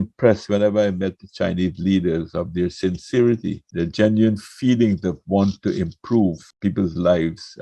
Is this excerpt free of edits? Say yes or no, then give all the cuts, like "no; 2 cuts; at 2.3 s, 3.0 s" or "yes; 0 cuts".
no; 2 cuts; at 3.6 s, 6.5 s